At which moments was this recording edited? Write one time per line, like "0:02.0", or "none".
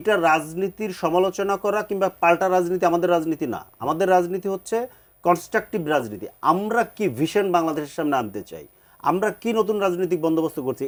none